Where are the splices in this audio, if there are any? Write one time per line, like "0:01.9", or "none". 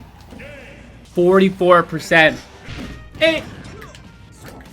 0:02.5